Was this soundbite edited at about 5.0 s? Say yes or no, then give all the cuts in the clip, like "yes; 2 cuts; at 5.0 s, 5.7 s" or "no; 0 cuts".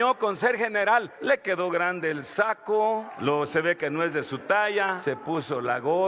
yes; 3 cuts; at 1.1 s, 3.1 s, 5.0 s